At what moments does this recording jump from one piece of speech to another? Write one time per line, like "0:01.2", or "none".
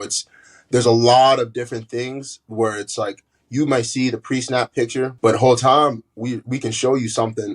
0:05.1